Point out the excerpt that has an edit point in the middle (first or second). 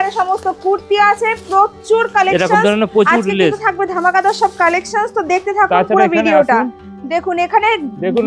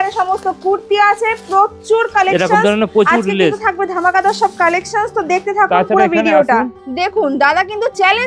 second